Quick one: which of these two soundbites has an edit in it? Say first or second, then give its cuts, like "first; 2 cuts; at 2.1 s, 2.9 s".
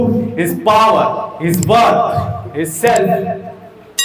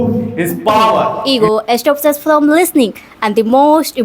second; 1 cut; at 1.2 s